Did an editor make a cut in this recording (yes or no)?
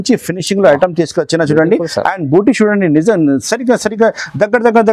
no